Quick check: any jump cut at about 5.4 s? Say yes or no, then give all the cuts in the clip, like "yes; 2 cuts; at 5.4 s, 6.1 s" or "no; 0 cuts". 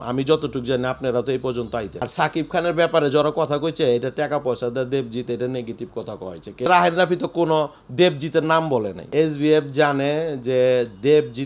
no; 3 cuts; at 2.0 s, 6.7 s, 9.1 s